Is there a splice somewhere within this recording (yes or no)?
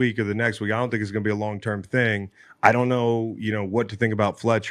no